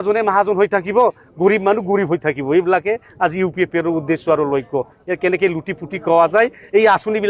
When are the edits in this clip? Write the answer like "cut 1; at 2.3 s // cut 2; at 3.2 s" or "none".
cut 1; at 4.9 s